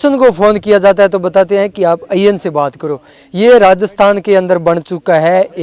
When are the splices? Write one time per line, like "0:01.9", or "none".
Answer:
none